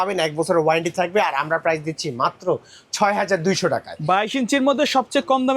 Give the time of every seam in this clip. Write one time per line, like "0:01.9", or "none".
none